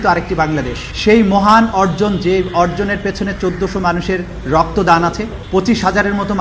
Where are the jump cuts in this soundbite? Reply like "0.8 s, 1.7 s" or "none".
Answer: none